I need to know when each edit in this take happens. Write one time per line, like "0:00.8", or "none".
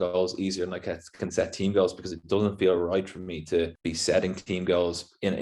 0:03.8